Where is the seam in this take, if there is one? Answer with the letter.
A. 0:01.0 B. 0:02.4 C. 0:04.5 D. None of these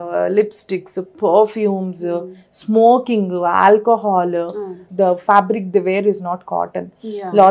D